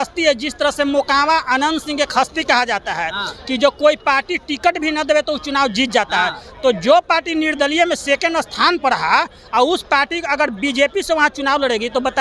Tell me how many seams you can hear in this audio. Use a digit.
0